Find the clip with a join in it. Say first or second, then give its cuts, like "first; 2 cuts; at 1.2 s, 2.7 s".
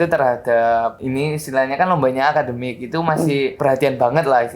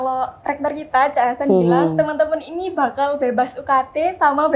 first; 2 cuts; at 1.0 s, 3.5 s